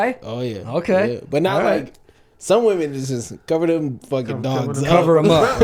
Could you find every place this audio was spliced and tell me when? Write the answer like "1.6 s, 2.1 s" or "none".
none